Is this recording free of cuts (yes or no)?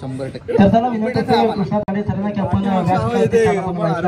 yes